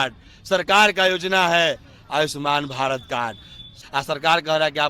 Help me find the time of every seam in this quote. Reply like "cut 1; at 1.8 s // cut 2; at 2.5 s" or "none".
cut 1; at 3.7 s